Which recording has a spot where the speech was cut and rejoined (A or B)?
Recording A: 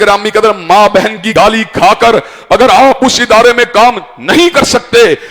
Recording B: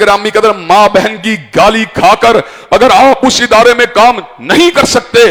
A